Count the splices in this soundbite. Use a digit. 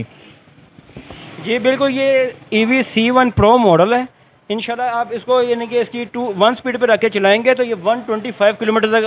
0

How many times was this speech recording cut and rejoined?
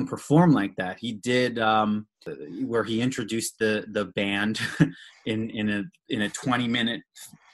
1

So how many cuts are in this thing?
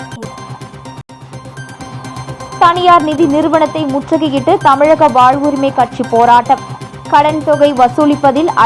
1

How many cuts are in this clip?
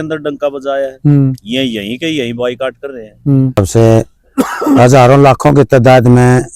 1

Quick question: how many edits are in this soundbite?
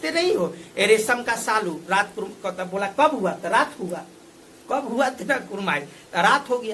0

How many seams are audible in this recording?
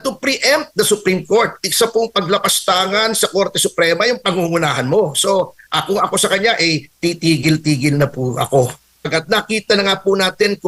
1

